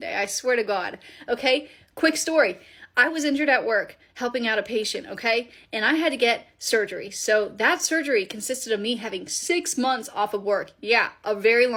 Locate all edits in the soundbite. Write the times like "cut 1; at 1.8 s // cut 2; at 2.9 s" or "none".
none

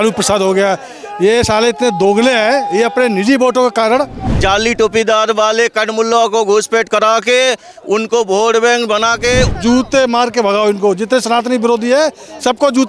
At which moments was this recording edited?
cut 1; at 4.2 s // cut 2; at 9.5 s

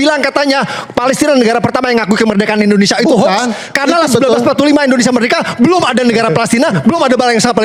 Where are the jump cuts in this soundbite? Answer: none

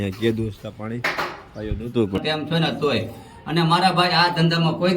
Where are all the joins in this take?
cut 1; at 2.2 s

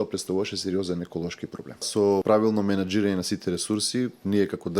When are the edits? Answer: cut 1; at 2.2 s

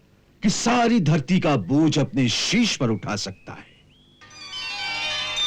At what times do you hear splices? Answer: none

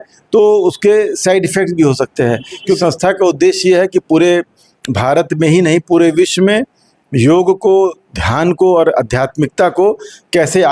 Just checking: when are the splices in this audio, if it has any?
cut 1; at 2.8 s

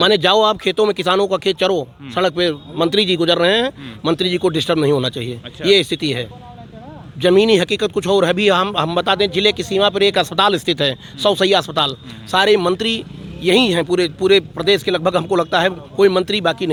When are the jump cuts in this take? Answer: none

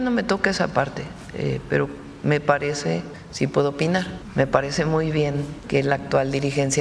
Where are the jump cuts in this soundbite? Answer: cut 1; at 3.2 s // cut 2; at 4.2 s // cut 3; at 5.5 s

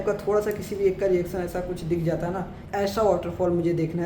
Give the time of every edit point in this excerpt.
cut 1; at 2.6 s

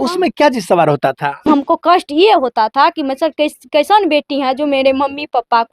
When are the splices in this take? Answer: cut 1; at 1.5 s

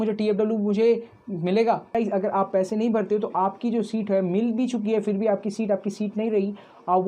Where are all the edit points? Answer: cut 1; at 1.9 s

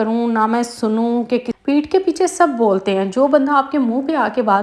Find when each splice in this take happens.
cut 1; at 1.5 s

